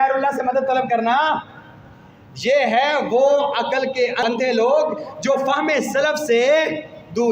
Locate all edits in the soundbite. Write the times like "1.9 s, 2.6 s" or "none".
4.2 s